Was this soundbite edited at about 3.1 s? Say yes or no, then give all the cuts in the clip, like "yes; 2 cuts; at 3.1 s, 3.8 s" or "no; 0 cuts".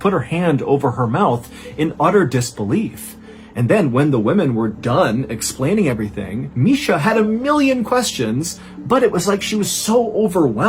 no; 0 cuts